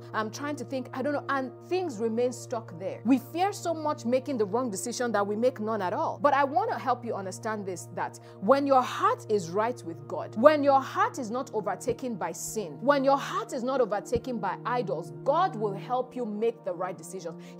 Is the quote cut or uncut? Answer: cut